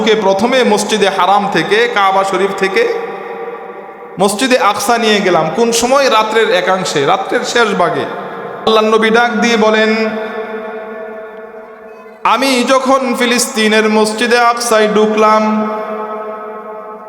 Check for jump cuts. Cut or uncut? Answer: cut